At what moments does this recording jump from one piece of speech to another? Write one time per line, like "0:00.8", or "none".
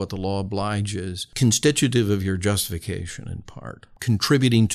0:01.2
0:03.9